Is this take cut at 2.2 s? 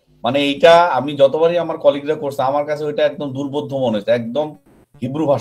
no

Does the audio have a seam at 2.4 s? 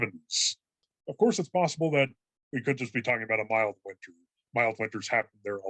no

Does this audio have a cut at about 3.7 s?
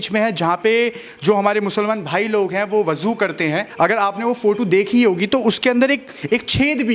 yes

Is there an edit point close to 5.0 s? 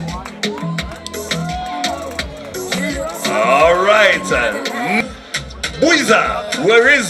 yes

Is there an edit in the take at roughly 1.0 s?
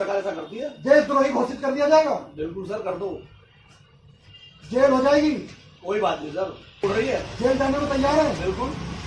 no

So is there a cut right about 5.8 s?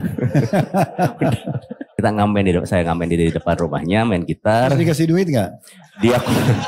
no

